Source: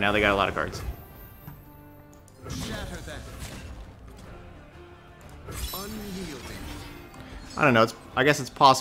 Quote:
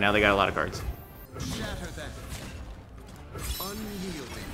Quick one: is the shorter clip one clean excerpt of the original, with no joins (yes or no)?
no